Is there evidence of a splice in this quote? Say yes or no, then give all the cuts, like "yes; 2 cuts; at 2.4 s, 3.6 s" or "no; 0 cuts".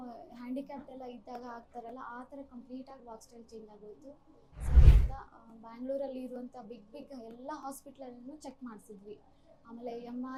no; 0 cuts